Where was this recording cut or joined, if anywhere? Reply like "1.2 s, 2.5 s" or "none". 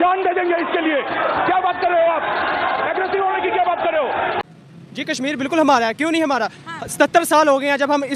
4.4 s